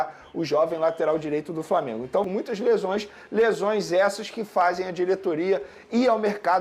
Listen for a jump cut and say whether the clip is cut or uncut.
cut